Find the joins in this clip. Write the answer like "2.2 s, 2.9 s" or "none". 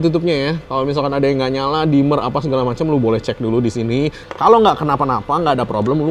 4.2 s